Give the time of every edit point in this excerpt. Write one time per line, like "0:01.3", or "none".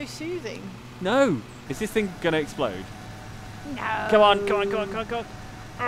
0:01.5